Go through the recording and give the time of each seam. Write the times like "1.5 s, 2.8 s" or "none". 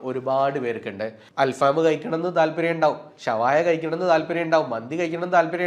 1.2 s